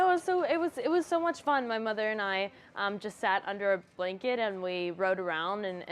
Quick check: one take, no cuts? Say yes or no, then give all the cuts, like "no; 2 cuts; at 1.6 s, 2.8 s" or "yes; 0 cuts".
yes; 0 cuts